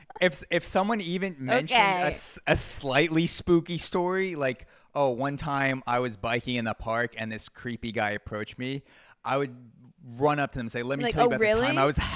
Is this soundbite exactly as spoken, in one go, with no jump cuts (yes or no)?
yes